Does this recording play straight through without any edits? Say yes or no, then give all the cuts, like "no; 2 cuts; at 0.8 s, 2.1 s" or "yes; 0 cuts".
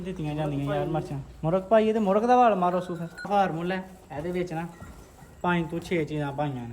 no; 1 cut; at 3.3 s